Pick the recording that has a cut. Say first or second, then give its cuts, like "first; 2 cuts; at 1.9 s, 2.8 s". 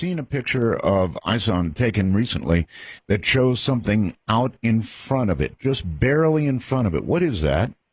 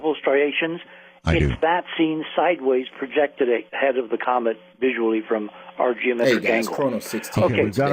second; 1 cut; at 6.1 s